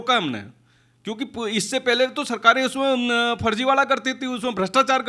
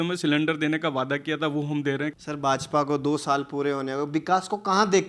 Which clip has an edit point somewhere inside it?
second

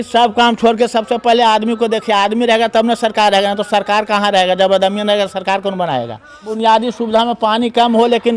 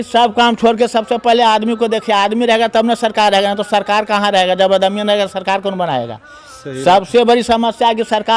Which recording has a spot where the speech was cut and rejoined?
first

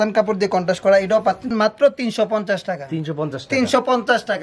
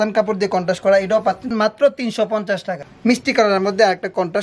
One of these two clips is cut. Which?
second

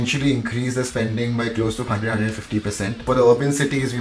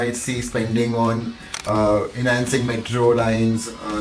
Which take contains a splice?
first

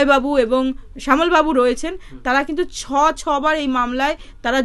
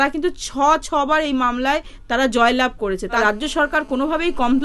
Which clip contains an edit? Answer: second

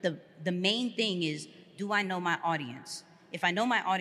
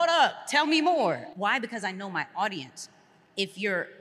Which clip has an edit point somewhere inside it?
second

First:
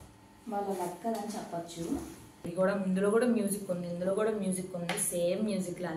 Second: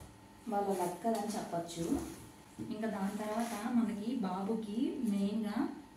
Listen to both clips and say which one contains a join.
first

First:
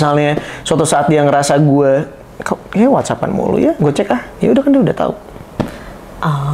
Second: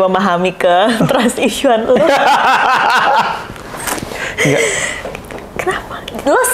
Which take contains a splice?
first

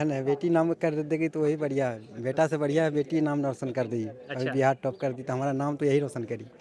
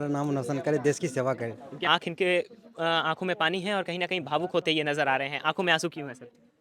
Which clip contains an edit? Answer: second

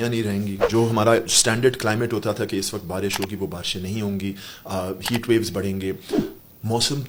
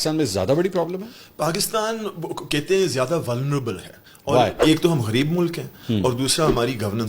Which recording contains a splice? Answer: second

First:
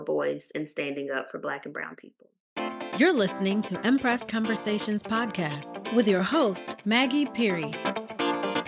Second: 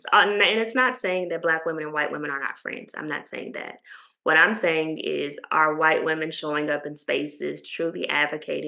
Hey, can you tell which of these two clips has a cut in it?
first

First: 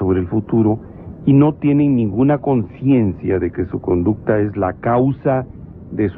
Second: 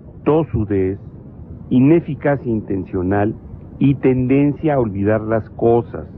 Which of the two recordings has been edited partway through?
second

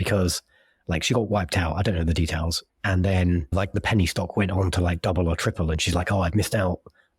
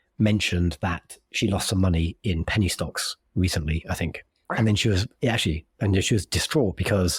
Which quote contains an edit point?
first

